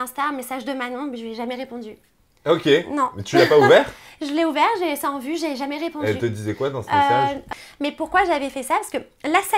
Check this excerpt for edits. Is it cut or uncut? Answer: cut